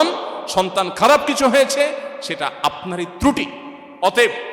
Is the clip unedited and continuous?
yes; 0 cuts

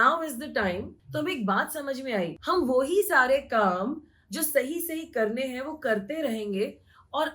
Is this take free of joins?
no; 2 cuts; at 1.0 s, 2.4 s

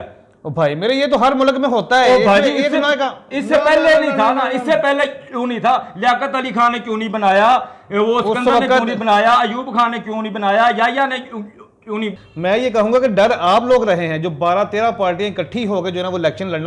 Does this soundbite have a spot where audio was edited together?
yes; 1 cut; at 12.2 s

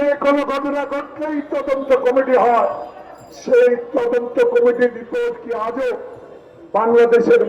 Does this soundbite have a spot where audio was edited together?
no; 0 cuts

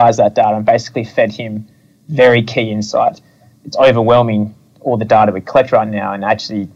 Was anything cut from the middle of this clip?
yes; 1 cut; at 3.6 s

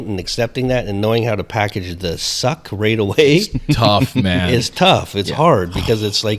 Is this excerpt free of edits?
yes; 0 cuts

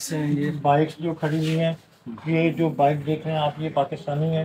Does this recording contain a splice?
no; 0 cuts

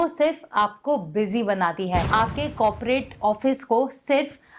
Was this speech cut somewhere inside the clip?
yes; 1 cut; at 2.1 s

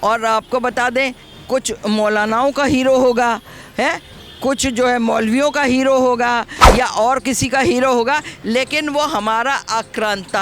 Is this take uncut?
no; 1 cut; at 6.6 s

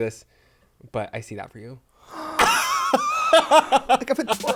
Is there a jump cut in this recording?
no; 0 cuts

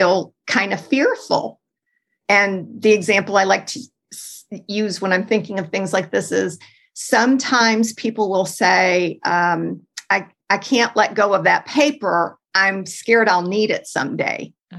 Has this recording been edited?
no; 0 cuts

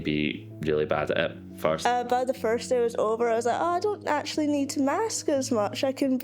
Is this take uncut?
yes; 0 cuts

